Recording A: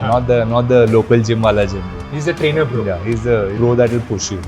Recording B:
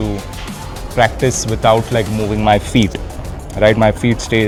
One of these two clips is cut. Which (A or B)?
A